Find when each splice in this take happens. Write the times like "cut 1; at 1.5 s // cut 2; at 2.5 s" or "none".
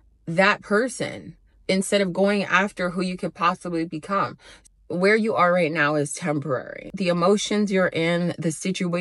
cut 1; at 4.6 s

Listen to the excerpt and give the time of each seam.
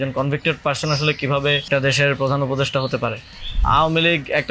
cut 1; at 1.7 s // cut 2; at 3.6 s

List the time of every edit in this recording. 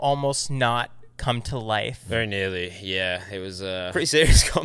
cut 1; at 2.0 s // cut 2; at 3.9 s

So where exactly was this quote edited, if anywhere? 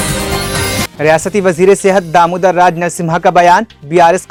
none

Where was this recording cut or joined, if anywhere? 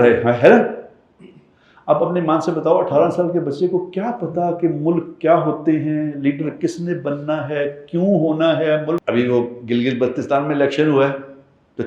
cut 1; at 9.0 s

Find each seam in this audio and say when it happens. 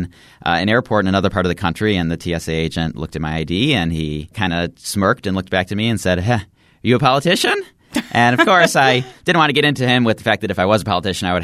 cut 1; at 4.3 s

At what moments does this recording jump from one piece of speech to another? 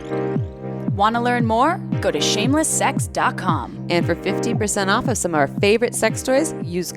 cut 1; at 0.9 s

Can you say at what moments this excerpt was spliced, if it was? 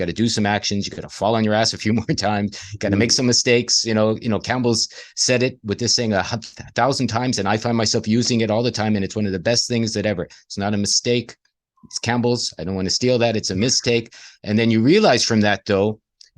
none

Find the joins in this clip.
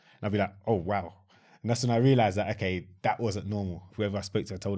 cut 1; at 3.8 s

